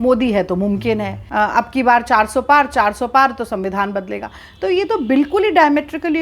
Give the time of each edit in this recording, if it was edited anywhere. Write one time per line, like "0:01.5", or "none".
0:01.2